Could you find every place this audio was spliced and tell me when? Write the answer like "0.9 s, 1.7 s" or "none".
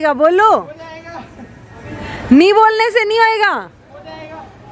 none